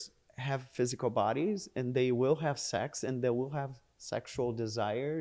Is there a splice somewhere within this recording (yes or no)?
no